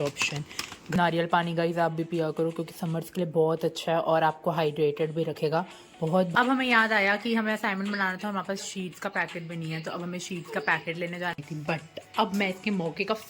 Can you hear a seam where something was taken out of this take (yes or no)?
yes